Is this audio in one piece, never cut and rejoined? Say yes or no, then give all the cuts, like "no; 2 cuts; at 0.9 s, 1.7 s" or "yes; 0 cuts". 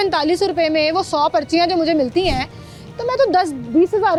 yes; 0 cuts